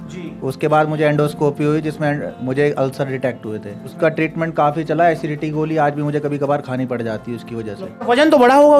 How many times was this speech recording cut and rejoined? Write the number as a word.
two